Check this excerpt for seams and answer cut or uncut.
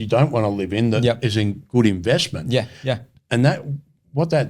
uncut